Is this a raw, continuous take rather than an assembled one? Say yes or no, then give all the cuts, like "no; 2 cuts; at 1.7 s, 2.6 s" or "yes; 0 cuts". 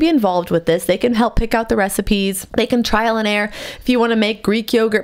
no; 1 cut; at 2.4 s